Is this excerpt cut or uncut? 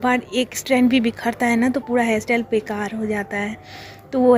uncut